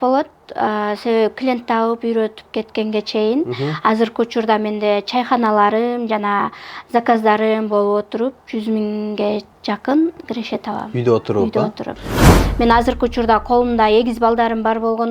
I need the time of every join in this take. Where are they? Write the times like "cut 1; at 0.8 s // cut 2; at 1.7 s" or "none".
cut 1; at 12.3 s